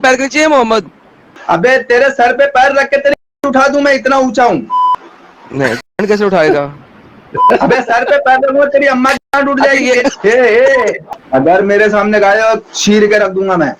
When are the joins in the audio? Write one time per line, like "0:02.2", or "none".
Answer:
0:11.1